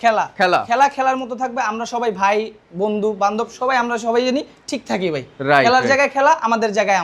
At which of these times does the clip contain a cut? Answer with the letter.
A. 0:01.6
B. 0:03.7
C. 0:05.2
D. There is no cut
D